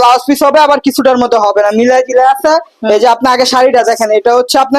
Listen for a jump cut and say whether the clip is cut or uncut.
uncut